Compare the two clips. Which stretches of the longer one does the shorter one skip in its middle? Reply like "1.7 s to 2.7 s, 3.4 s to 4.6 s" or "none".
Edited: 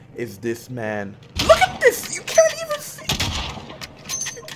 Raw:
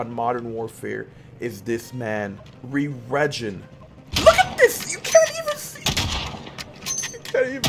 2.5 s to 4.0 s